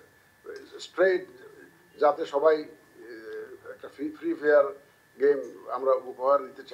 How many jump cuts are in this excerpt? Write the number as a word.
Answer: zero